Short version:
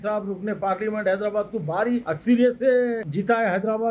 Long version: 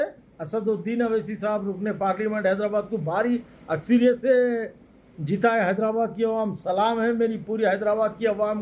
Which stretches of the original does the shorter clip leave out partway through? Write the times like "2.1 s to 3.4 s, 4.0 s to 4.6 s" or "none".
3.5 s to 3.7 s, 4.7 s to 5.2 s